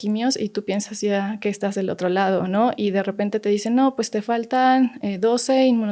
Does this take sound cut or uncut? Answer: uncut